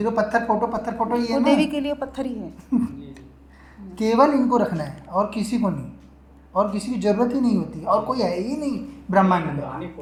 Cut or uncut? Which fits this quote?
uncut